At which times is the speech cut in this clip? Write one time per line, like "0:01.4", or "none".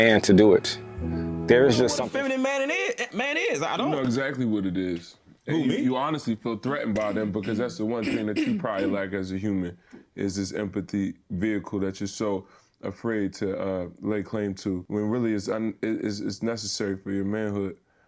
0:01.9